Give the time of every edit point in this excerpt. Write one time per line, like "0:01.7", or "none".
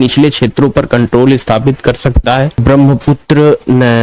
0:02.6